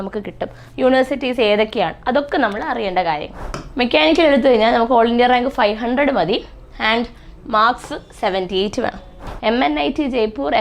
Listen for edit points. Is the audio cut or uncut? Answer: cut